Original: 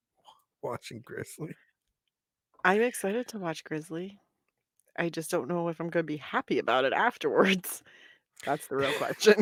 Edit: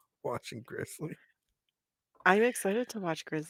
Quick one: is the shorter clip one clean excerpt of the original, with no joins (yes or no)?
yes